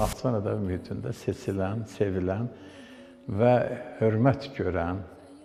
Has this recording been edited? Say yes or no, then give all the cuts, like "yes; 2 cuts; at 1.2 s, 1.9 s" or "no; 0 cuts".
no; 0 cuts